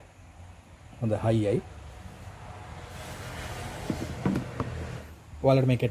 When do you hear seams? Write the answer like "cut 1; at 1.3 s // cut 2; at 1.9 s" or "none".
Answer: none